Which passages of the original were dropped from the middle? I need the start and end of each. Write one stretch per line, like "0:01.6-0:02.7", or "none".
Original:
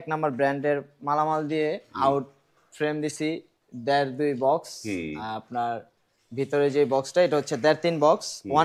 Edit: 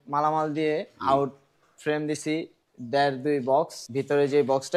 0:04.7-0:06.2